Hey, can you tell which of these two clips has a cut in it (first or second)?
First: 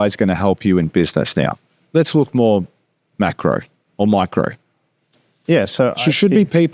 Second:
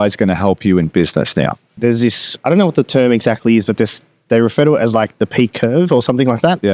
second